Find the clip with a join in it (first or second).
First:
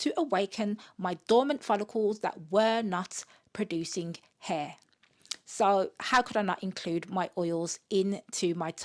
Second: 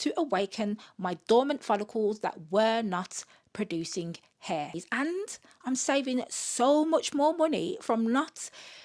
second